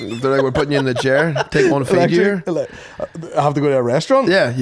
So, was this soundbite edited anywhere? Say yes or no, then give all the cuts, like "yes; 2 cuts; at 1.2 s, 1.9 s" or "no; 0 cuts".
no; 0 cuts